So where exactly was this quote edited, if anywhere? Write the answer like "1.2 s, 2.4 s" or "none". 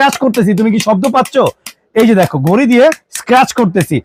none